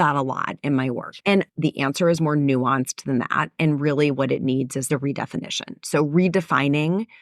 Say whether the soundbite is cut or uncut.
cut